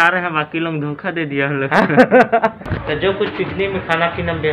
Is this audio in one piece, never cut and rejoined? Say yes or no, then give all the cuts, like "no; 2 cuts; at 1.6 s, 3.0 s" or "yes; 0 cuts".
no; 1 cut; at 2.3 s